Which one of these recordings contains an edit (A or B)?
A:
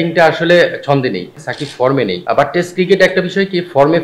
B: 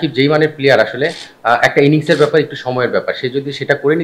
A